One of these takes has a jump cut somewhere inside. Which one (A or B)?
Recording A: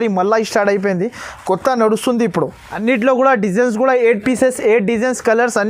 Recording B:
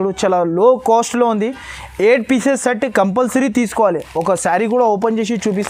A